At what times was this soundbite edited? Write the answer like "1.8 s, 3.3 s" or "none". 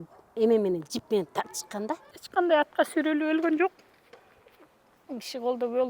2.1 s